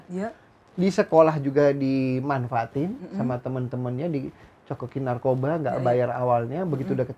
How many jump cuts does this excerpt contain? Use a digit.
0